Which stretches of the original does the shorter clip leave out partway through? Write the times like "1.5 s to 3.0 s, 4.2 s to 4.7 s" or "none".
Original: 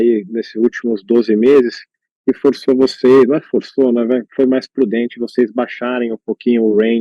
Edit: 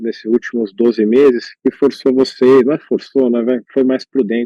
1.8 s to 2.1 s